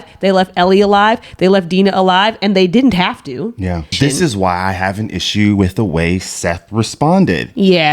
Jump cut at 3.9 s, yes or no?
yes